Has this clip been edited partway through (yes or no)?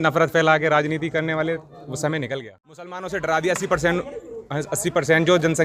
yes